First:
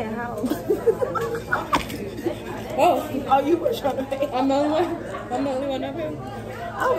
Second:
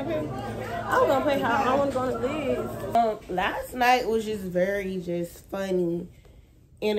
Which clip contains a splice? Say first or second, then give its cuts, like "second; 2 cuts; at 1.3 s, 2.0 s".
second; 1 cut; at 2.9 s